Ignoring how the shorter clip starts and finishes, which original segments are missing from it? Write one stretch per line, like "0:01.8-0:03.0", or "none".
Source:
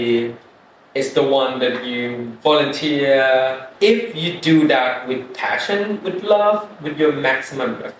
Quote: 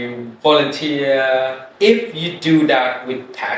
none

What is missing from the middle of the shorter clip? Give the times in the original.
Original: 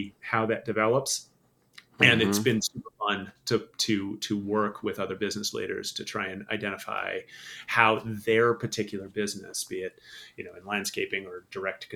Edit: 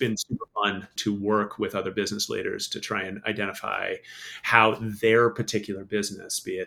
0:03.4-0:04.2

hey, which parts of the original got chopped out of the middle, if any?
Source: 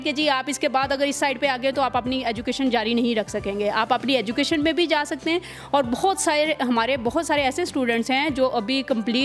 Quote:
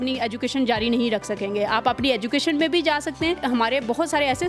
0:05.5-0:06.6

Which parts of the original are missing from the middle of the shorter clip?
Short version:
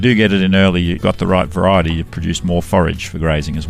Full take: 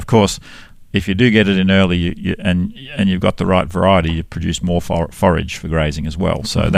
0:02.1-0:03.2
0:04.9-0:05.2

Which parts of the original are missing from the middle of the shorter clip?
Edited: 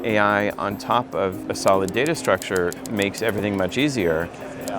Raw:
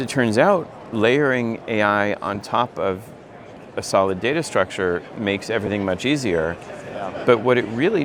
0:03.1-0:03.7

